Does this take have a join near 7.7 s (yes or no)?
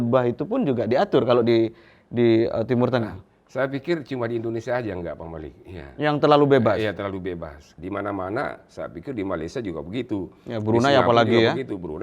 yes